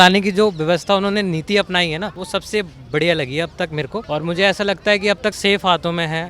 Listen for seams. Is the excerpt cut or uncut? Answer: cut